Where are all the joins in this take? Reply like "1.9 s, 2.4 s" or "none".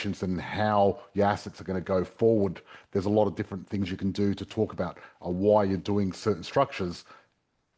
none